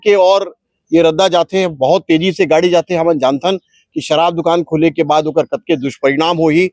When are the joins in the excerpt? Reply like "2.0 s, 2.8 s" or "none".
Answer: none